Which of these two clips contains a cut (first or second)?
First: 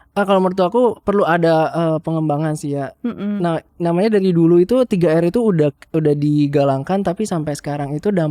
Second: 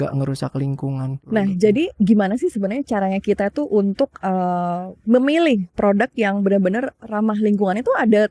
second